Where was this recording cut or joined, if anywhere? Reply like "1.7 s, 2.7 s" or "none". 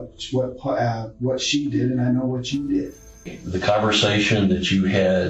3.4 s